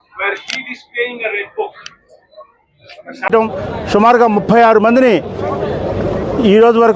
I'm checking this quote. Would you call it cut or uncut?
cut